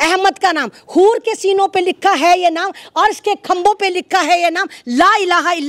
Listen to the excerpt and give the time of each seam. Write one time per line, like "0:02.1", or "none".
none

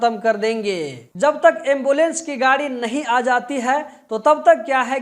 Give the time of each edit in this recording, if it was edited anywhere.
0:01.1

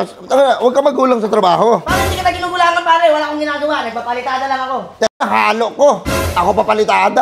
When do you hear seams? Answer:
none

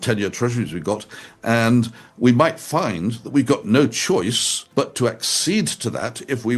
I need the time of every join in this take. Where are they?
none

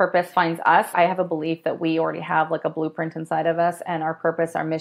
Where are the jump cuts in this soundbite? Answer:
0:00.9

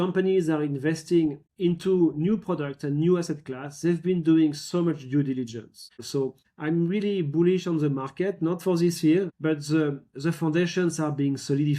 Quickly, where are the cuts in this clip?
0:06.3
0:09.3

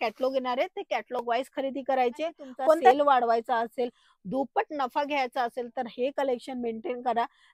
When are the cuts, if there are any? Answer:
0:02.9

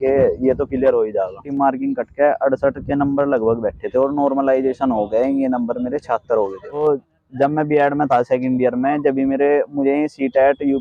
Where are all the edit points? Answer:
0:01.5
0:06.8

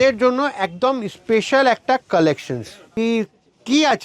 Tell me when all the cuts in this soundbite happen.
0:02.8

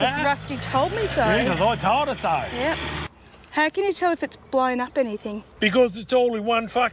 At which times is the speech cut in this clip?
0:02.9
0:05.5

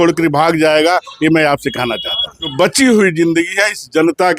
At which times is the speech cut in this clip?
0:02.5

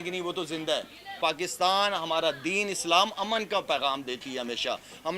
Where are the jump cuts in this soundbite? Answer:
0:01.1

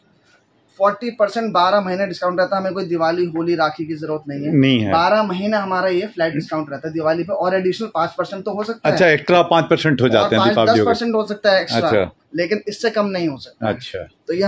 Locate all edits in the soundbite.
none

